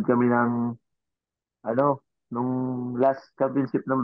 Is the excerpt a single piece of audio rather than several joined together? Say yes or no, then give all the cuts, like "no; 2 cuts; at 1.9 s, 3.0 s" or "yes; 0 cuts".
yes; 0 cuts